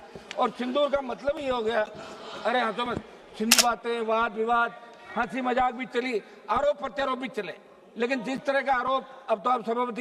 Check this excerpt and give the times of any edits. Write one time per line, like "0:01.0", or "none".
0:03.5

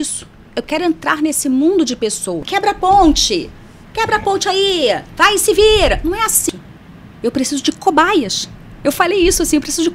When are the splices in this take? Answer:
0:02.5
0:06.4

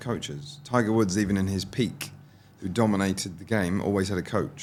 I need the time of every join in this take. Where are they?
none

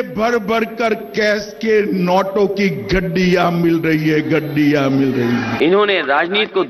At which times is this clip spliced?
0:05.5

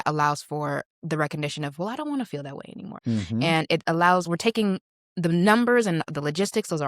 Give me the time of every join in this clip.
0:00.9
0:02.9

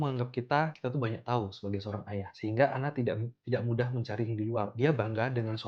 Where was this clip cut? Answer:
none

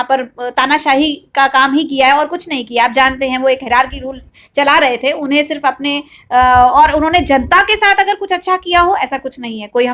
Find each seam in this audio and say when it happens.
none

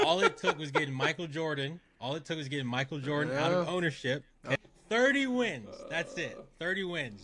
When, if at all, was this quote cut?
0:04.6

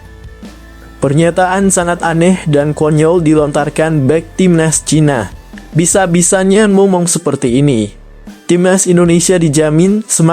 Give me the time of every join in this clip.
0:01.0

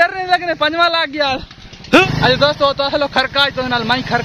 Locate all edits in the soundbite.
0:02.1

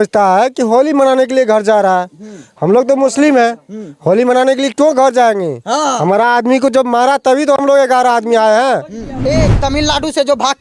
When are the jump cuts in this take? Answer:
0:09.2

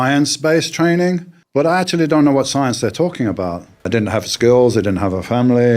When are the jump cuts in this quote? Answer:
0:01.3
0:03.9

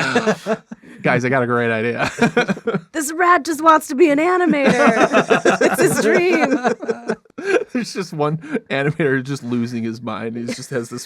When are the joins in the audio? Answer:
0:07.2

